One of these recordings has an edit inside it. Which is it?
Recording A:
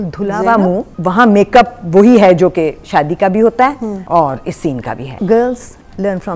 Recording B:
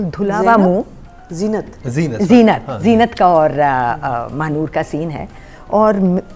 A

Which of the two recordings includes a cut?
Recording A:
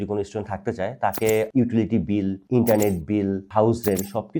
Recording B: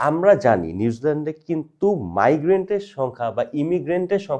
A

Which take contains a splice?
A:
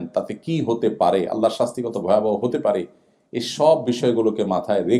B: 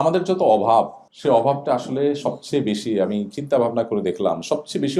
B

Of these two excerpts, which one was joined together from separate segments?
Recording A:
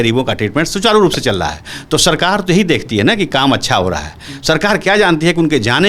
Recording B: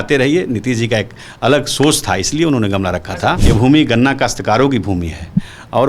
B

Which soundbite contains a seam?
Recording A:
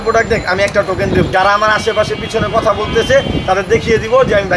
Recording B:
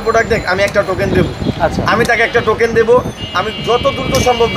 A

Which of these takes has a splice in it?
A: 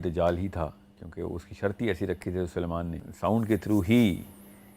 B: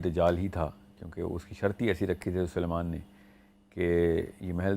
A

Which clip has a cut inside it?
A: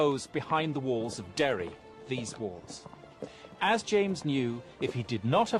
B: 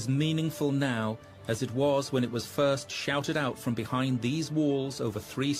B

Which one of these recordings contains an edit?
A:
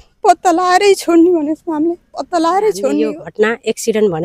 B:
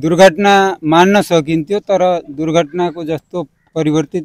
A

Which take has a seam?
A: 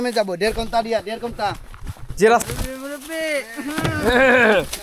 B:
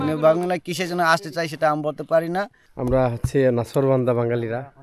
B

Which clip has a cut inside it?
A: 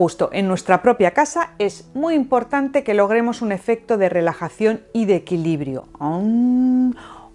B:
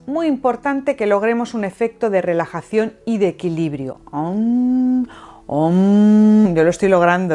B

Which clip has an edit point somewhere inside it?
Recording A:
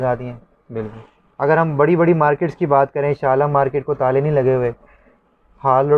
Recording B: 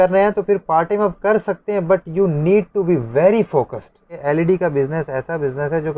B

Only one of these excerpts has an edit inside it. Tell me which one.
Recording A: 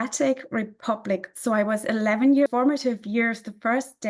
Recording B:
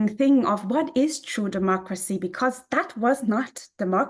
A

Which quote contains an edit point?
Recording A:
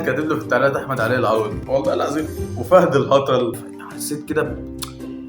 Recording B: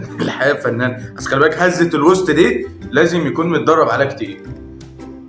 A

